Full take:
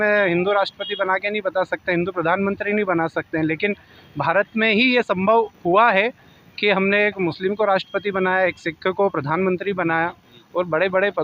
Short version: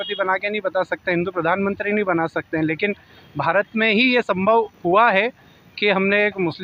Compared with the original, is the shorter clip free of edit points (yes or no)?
yes